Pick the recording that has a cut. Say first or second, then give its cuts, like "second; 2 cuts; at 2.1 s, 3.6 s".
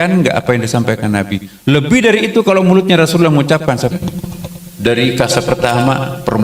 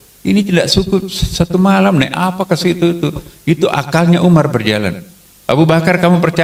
first; 1 cut; at 3.9 s